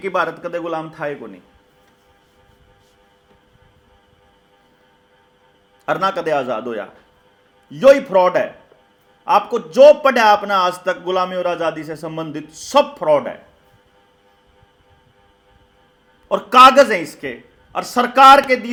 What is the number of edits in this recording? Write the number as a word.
zero